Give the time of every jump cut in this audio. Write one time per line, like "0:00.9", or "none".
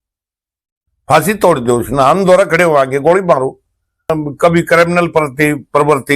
0:04.1